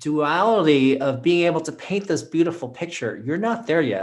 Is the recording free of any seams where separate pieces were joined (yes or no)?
yes